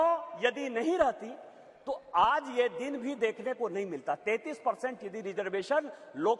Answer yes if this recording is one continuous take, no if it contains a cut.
yes